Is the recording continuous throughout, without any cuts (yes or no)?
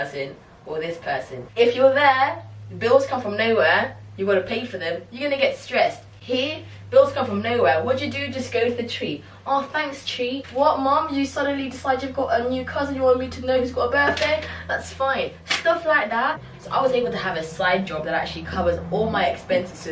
no